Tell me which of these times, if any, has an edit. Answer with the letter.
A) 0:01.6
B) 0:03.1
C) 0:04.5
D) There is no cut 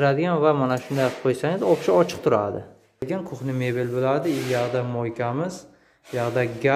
B